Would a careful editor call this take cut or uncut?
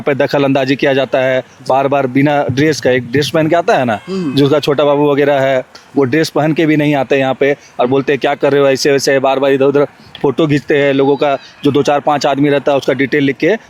uncut